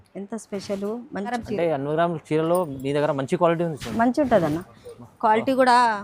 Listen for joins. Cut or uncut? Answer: cut